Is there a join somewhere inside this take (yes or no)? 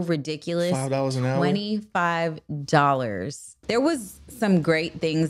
yes